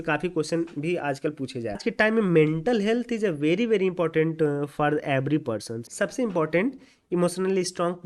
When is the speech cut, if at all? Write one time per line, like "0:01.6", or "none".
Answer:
0:01.8
0:03.5
0:05.9